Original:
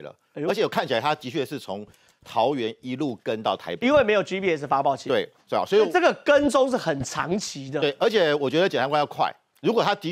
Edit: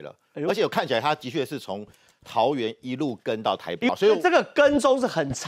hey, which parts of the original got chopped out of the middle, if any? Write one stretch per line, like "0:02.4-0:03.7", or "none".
0:03.9-0:05.6